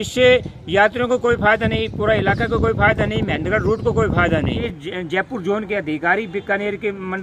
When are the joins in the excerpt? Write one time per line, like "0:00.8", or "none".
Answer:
0:04.7